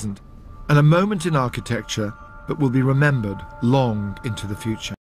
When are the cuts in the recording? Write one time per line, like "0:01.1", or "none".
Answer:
0:02.2

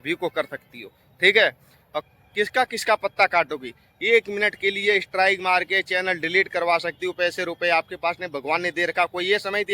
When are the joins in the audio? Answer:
0:02.0

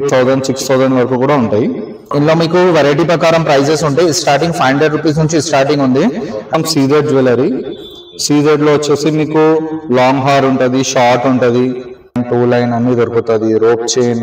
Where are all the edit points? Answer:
0:02.1
0:06.6
0:12.2

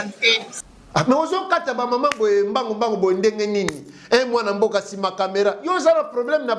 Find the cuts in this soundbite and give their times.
none

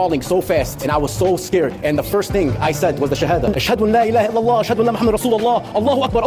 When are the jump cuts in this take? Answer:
0:03.5

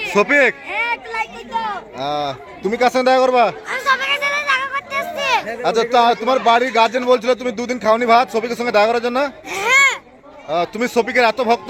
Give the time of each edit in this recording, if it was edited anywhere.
none

